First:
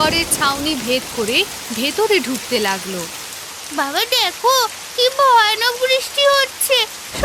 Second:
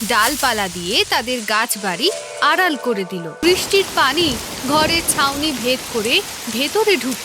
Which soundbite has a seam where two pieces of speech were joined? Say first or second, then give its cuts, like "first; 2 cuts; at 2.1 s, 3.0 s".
second; 1 cut; at 3.3 s